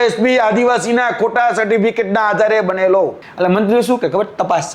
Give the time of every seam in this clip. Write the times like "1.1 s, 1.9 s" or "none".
3.2 s